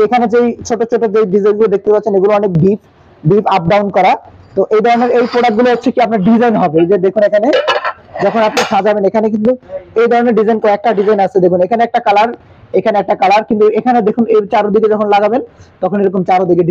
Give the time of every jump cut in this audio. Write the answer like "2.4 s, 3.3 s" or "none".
none

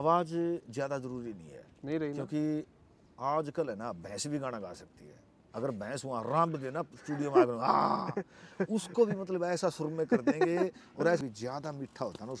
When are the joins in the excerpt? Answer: 11.2 s

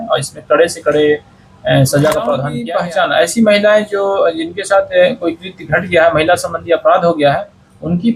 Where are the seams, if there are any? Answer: 2.5 s

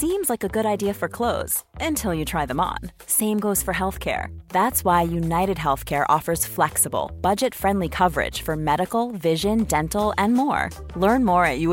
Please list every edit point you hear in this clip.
none

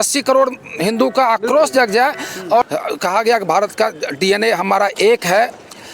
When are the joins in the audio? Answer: 2.7 s

